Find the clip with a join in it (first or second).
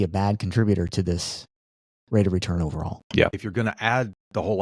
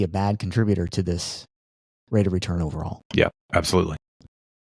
first